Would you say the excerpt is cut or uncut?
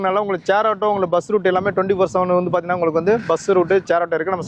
uncut